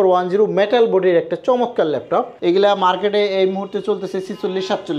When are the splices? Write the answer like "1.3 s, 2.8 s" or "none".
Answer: 2.3 s